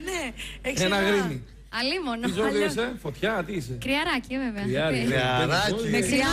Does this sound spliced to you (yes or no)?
no